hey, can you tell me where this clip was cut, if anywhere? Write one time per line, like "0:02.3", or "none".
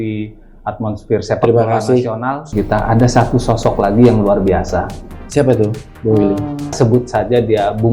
0:02.5
0:06.8